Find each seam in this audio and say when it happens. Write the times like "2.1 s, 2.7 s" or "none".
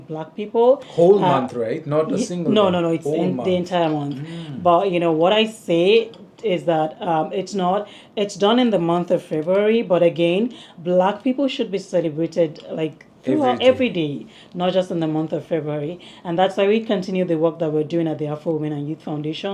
none